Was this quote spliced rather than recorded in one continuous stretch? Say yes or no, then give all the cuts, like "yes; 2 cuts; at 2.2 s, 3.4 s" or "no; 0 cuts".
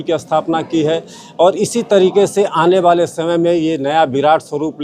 no; 0 cuts